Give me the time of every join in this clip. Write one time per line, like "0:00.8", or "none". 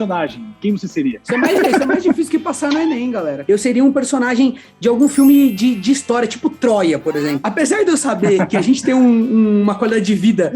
0:03.4